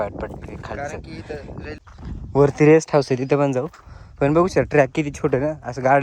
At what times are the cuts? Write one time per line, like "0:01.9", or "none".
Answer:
0:01.8